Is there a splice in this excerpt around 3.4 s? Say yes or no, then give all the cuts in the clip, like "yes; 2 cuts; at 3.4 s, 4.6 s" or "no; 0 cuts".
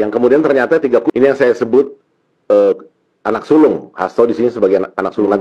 no; 1 cut; at 1.1 s